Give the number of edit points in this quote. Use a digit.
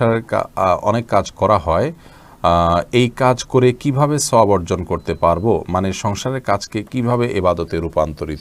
0